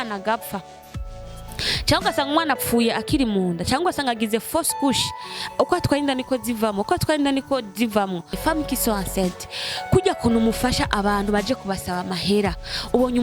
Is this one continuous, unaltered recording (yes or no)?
no